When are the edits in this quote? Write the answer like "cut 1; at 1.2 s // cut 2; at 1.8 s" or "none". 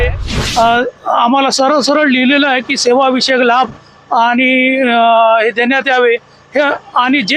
none